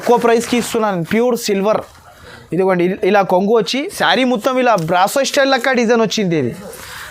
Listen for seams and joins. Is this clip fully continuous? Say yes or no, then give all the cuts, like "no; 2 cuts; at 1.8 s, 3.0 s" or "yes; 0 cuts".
no; 1 cut; at 3.8 s